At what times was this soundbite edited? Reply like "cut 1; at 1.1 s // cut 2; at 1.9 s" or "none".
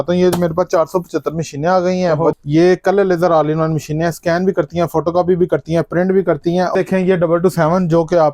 cut 1; at 2.4 s // cut 2; at 6.7 s